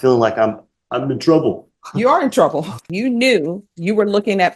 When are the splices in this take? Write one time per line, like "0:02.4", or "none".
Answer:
0:02.9